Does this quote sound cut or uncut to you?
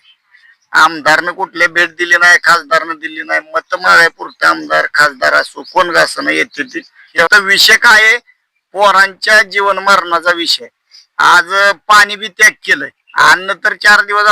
cut